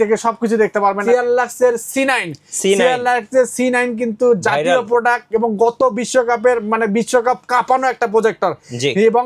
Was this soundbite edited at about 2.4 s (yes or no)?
no